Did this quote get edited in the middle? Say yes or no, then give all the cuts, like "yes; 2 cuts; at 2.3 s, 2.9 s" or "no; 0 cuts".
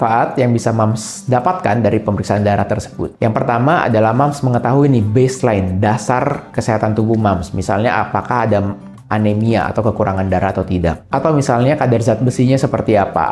no; 0 cuts